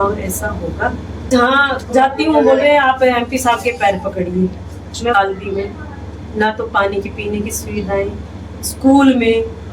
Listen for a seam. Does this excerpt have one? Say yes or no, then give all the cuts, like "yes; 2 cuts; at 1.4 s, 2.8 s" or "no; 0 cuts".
yes; 2 cuts; at 1.3 s, 5.1 s